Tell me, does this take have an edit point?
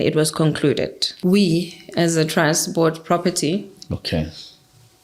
yes; 1 cut; at 1.2 s

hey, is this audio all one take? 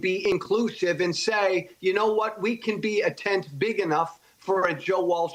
yes; 0 cuts

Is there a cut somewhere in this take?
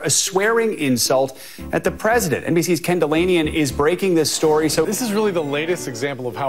yes; 2 cuts; at 2.4 s, 4.9 s

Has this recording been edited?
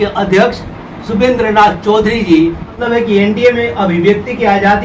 yes; 1 cut; at 2.8 s

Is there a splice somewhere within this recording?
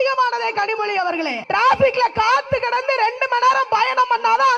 yes; 1 cut; at 1.4 s

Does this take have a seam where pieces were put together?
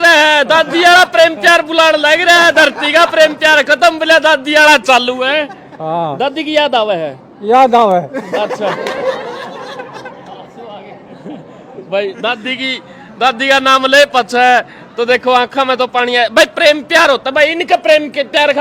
no; 0 cuts

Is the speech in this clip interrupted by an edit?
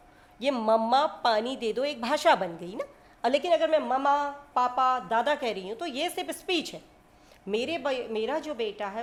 no; 0 cuts

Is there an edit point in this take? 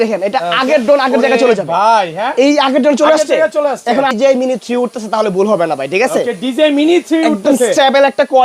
yes; 1 cut; at 4.1 s

